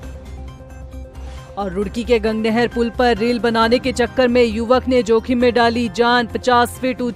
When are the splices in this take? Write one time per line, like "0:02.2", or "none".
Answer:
0:01.0